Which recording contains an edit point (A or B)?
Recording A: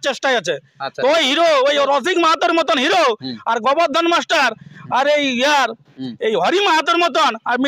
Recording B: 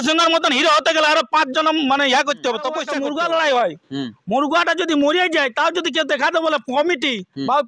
B